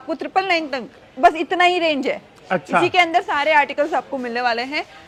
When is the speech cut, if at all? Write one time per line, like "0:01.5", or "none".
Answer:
none